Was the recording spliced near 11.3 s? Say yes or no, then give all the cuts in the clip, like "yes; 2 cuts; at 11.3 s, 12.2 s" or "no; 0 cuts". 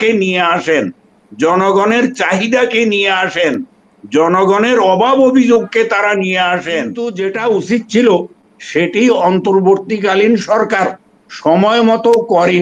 no; 1 cut; at 7.1 s